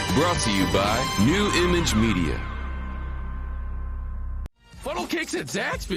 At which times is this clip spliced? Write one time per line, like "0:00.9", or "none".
0:04.5